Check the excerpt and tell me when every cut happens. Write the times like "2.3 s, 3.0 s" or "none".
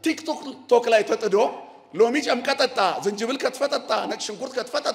none